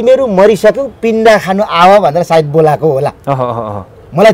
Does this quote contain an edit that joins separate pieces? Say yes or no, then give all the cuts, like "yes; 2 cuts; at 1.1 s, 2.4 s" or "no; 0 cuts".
no; 0 cuts